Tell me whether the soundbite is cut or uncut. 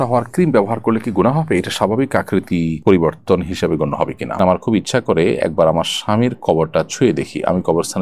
cut